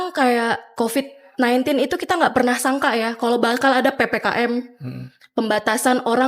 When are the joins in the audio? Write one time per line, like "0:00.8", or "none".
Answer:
none